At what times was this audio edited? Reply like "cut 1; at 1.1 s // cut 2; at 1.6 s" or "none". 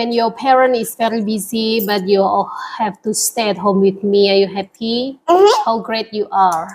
none